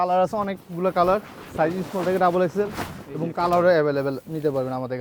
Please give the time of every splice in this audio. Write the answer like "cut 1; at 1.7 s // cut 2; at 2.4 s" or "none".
none